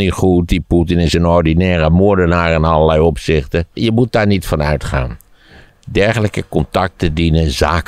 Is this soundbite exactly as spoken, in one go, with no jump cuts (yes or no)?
no